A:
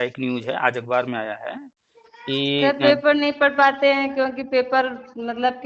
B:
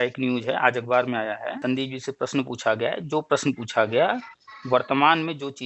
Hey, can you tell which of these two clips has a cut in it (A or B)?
B